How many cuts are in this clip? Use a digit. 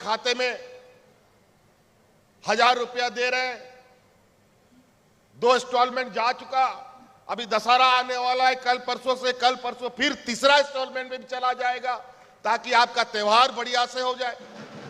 0